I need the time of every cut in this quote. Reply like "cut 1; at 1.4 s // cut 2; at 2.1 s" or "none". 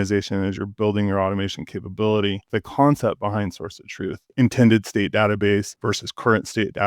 cut 1; at 2.5 s // cut 2; at 4.2 s // cut 3; at 5.7 s